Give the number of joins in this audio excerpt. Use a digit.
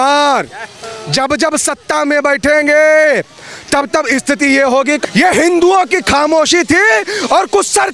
1